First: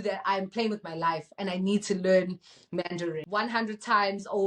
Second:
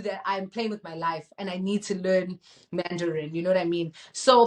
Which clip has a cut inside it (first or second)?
first